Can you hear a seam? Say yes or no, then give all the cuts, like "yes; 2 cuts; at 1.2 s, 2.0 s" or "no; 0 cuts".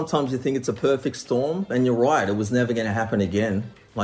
no; 0 cuts